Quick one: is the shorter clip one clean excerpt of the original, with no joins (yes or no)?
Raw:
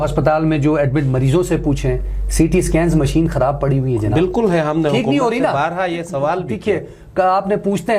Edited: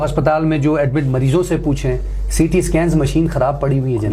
yes